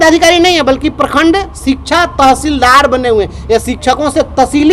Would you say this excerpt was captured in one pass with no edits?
yes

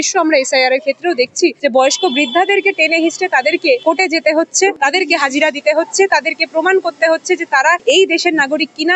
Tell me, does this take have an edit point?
yes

